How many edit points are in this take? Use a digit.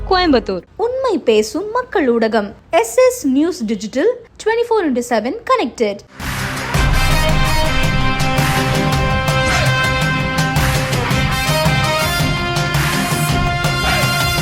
0